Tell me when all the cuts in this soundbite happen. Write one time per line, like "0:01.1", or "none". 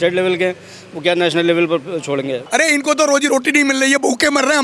0:02.4